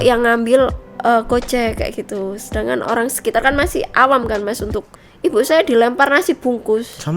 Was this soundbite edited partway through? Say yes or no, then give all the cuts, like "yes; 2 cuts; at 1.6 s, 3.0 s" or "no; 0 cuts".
yes; 1 cut; at 4.9 s